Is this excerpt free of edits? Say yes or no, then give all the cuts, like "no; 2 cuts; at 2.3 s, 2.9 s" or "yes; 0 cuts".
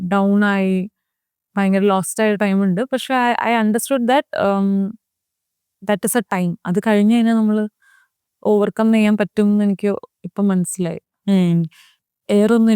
yes; 0 cuts